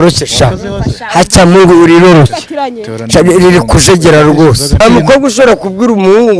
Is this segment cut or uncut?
cut